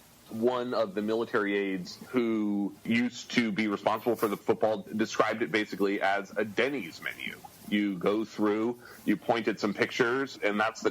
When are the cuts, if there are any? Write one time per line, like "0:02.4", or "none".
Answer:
0:01.9
0:02.8
0:04.4